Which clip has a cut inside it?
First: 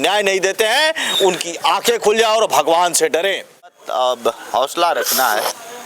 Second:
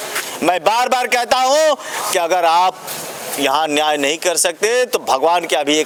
first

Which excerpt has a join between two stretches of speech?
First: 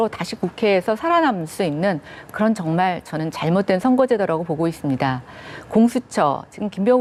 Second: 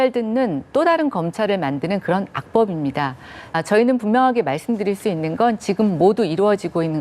second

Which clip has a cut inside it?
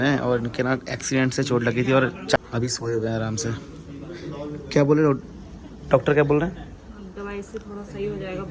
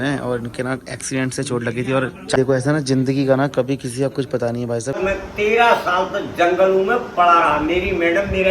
second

